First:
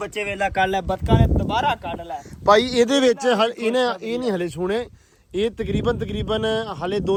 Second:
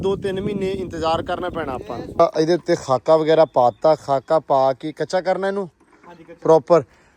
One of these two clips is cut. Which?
second; 1 cut; at 2.2 s

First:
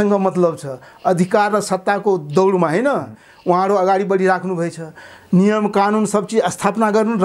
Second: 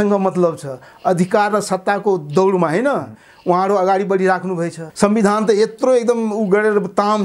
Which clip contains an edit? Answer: second; 1 cut; at 4.8 s

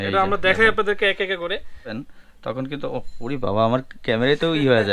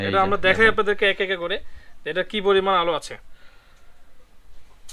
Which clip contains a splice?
first; 1 cut; at 2.0 s

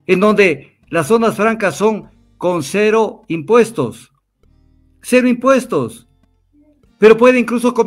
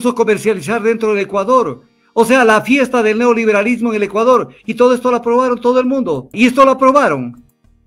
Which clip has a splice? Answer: second; 1 cut; at 6.3 s

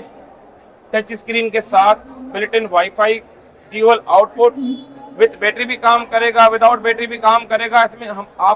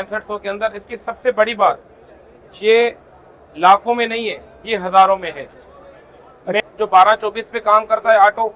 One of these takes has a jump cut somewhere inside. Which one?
second; 1 cut; at 6.6 s

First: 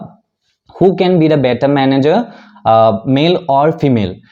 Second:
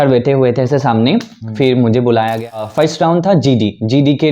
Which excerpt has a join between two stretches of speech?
second; 1 cut; at 2.7 s

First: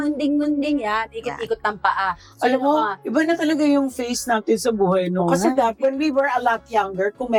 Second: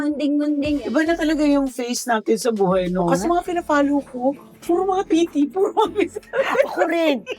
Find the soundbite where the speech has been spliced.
second; 3 cuts; at 0.8 s, 3.2 s, 5.0 s

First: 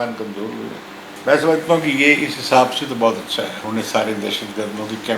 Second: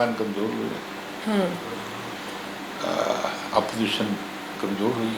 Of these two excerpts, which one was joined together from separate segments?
first; 2 cuts; at 1.1 s, 3.6 s

